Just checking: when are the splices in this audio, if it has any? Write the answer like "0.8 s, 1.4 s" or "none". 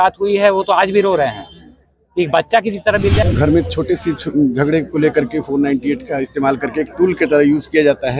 3.2 s